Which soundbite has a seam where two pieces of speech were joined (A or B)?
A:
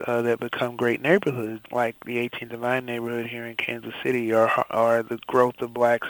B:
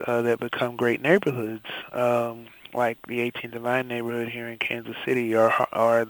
A